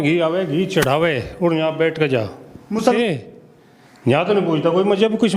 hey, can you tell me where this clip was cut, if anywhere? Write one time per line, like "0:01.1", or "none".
0:03.0